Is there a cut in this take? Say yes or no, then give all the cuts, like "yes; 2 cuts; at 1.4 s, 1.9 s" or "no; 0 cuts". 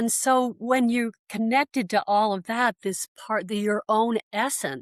no; 0 cuts